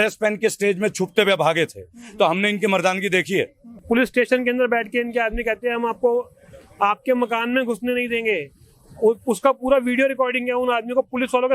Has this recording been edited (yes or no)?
yes